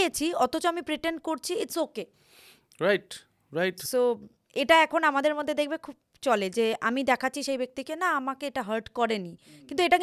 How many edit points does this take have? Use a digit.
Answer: 0